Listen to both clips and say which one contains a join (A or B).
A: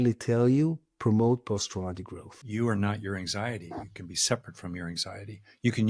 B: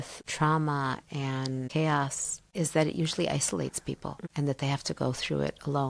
A